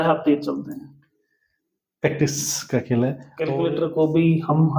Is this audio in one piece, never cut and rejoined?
no; 1 cut; at 3.3 s

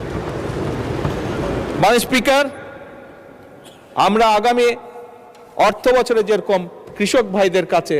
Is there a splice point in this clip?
no; 0 cuts

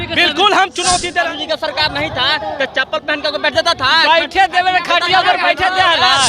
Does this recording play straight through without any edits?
no; 1 cut; at 1.3 s

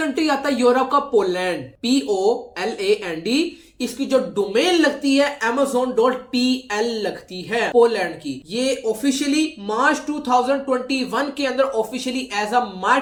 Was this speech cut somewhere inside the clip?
no; 0 cuts

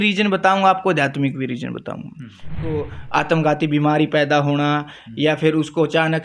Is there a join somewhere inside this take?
yes; 1 cut; at 2.6 s

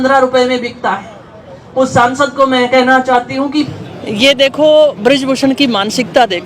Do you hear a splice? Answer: yes; 1 cut; at 3.5 s

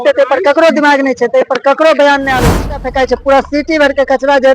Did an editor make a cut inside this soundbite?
yes; 1 cut; at 2.9 s

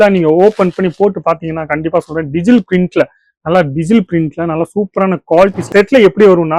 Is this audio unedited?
no; 1 cut; at 5.6 s

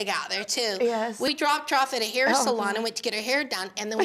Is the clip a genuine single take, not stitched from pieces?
no; 1 cut; at 1.3 s

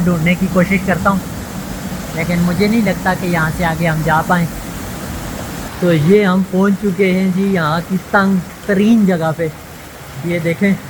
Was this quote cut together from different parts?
yes; 1 cut; at 5.7 s

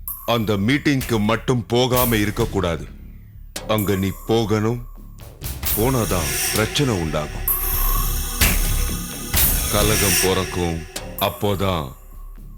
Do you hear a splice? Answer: no; 0 cuts

